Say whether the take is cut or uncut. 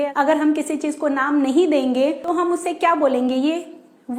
cut